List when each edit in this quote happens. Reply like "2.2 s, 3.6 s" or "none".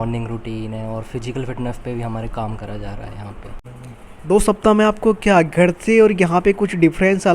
3.7 s